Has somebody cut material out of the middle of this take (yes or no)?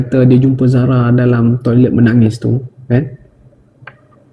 no